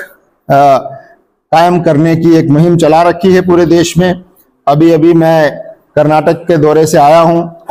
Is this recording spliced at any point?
no; 0 cuts

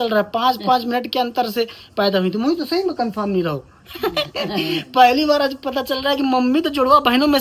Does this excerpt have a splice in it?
no; 0 cuts

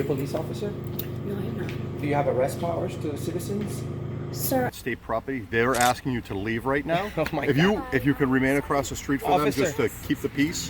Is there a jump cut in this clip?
yes; 1 cut; at 4.8 s

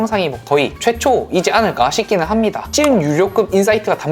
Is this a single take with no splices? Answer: no; 1 cut; at 2.7 s

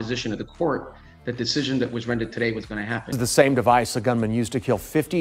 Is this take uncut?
no; 1 cut; at 3.0 s

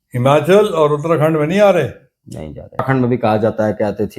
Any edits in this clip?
yes; 1 cut; at 2.8 s

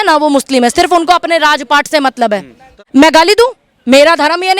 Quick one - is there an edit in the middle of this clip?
yes; 1 cut; at 2.8 s

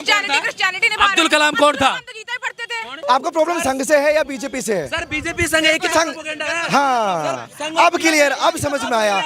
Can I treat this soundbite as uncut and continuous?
no; 1 cut; at 2.9 s

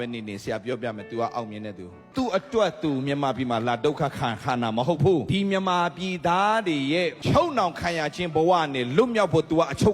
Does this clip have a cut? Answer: yes; 3 cuts; at 2.0 s, 5.3 s, 7.2 s

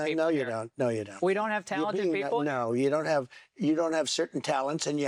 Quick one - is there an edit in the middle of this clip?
no; 0 cuts

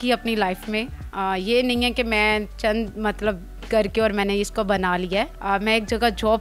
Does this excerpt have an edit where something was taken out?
yes; 1 cut; at 5.4 s

